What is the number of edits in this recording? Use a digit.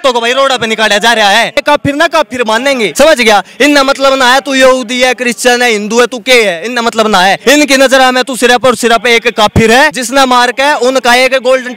4